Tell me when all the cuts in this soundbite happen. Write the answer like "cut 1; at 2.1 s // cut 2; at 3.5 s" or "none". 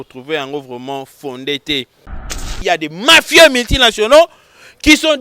cut 1; at 2.5 s